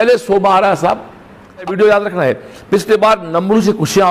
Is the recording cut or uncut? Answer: cut